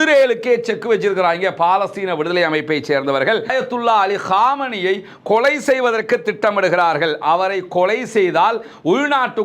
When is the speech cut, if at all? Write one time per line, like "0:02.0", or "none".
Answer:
0:03.5